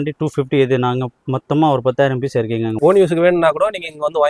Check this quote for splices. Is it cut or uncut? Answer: cut